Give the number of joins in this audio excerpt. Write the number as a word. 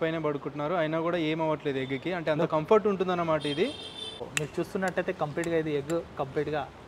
one